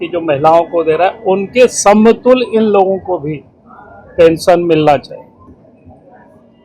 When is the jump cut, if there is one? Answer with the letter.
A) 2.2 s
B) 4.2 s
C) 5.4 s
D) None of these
D